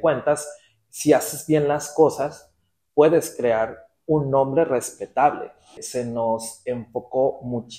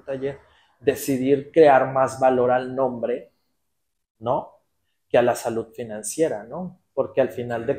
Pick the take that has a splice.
first; 1 cut; at 5.8 s

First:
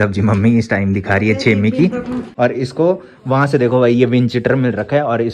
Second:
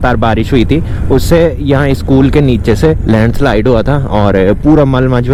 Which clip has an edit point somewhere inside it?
first; 1 cut; at 2.3 s

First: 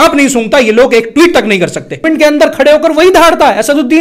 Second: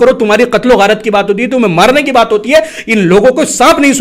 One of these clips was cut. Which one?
first; 1 cut; at 2.0 s

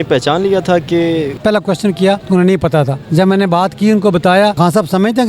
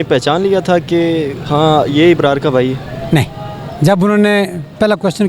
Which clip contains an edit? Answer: first; 4 cuts; at 1.3 s, 2.2 s, 3.0 s, 4.6 s

